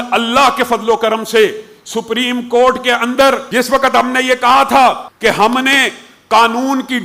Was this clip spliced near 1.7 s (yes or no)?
no